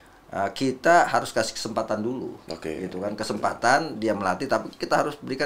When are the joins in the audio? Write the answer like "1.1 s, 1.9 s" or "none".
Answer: none